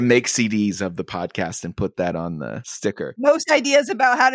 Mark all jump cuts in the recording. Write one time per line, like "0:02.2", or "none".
0:03.2